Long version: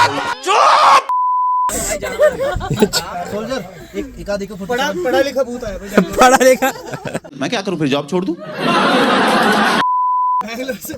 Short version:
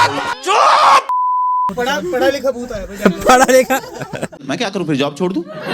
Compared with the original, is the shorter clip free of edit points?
no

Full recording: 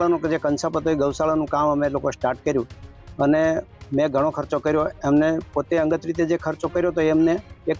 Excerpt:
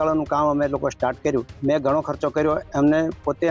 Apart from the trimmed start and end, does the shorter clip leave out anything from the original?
yes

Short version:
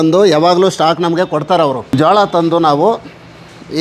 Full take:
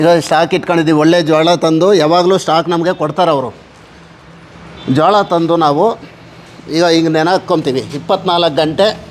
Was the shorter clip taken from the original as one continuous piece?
no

